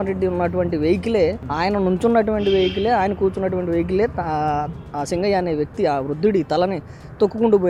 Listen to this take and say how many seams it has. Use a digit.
0